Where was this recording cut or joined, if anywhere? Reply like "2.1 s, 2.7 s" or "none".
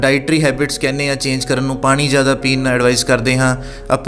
none